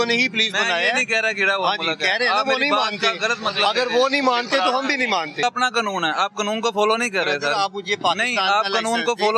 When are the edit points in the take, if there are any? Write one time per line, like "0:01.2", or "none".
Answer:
0:05.4

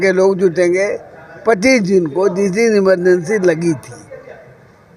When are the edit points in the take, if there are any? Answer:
none

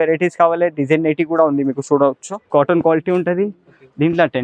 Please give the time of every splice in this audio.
0:02.3

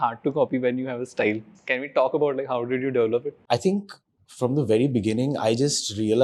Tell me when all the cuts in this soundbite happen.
0:01.5
0:03.4

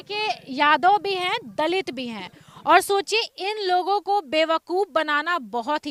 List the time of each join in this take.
none

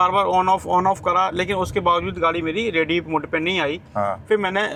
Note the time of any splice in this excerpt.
none

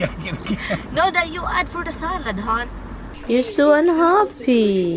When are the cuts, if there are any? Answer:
0:03.1

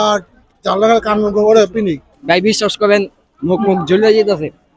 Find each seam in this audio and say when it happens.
0:02.1

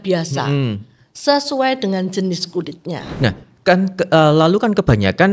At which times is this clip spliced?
0:03.0

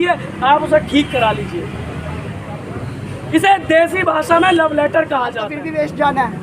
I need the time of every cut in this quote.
0:05.5

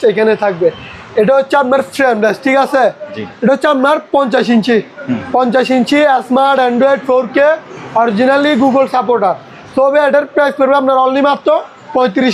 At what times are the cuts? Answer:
none

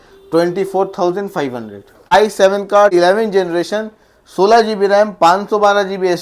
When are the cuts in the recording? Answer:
0:02.1
0:02.9

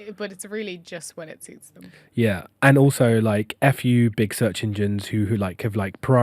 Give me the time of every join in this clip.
0:02.5

